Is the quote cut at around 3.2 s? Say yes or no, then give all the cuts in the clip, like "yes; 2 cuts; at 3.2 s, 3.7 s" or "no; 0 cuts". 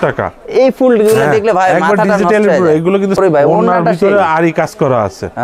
yes; 1 cut; at 3.2 s